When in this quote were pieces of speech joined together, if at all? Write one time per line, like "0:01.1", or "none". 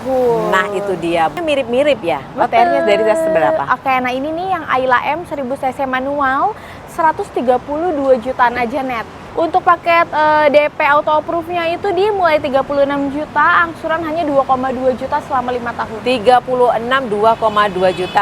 0:01.4
0:09.2

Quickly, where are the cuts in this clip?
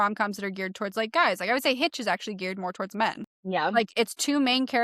0:03.7

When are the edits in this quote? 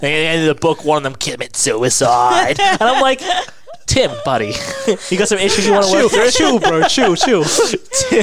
none

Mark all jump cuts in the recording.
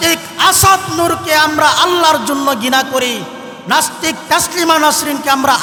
none

